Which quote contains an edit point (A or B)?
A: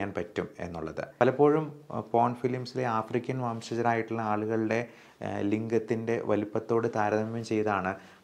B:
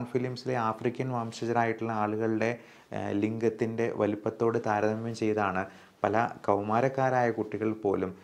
A